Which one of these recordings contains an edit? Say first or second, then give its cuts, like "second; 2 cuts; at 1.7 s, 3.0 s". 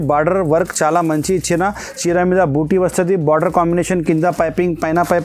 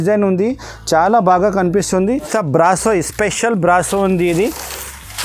second; 1 cut; at 2.3 s